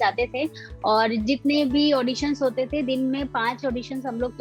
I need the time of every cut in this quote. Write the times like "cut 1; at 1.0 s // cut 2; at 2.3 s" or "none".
none